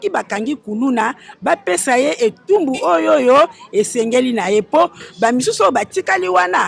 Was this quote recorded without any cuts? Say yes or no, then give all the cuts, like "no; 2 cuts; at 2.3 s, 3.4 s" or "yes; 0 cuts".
yes; 0 cuts